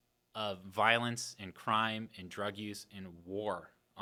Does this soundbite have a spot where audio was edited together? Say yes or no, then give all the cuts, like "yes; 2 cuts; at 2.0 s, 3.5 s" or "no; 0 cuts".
no; 0 cuts